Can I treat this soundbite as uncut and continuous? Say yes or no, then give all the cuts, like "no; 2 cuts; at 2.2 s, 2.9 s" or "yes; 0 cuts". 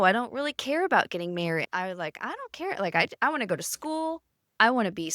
no; 1 cut; at 1.6 s